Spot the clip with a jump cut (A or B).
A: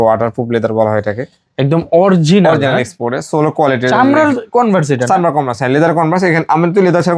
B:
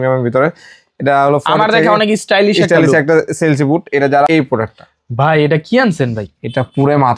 B